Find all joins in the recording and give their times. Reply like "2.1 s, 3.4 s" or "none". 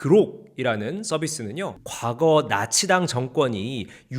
1.8 s

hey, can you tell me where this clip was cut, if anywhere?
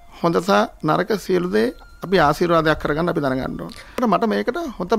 4.0 s

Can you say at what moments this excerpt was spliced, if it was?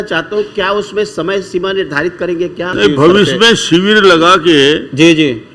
2.7 s

